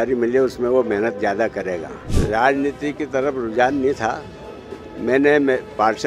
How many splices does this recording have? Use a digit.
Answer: 1